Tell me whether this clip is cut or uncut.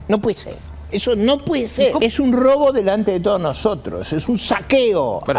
cut